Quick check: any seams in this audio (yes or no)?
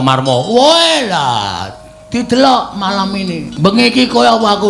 yes